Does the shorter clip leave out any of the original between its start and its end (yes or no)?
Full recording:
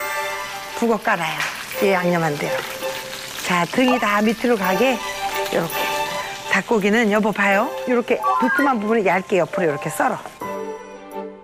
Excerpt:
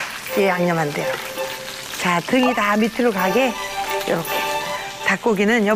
no